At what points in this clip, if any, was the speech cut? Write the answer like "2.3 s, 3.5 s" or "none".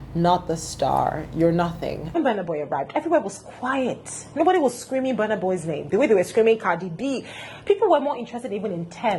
2.1 s